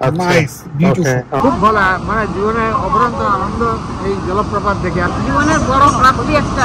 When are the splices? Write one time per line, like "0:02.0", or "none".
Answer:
0:01.4
0:05.1